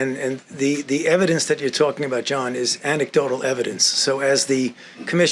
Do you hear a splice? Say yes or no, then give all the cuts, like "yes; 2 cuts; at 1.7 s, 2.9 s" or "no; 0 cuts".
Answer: no; 0 cuts